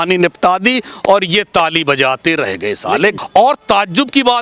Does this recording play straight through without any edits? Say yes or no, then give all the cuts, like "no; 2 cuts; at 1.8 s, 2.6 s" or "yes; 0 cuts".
no; 1 cut; at 3.2 s